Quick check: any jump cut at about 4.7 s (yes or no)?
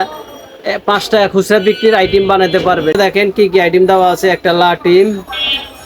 no